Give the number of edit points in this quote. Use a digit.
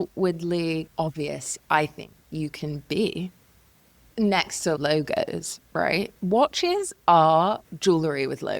1